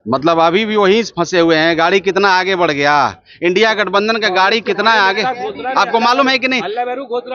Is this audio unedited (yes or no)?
yes